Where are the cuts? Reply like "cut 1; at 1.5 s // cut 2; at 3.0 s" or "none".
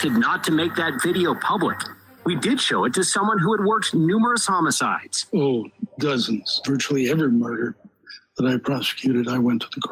cut 1; at 5.8 s